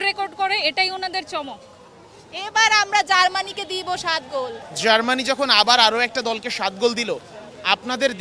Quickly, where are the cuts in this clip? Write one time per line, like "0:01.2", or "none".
0:04.6